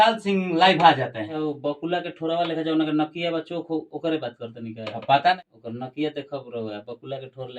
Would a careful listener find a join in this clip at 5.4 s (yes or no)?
yes